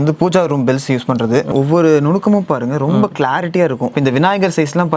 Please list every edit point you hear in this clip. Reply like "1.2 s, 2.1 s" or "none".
1.5 s, 3.9 s